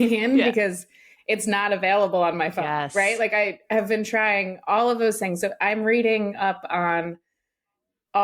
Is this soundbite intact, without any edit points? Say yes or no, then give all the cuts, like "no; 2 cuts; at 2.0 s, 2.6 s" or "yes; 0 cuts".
yes; 0 cuts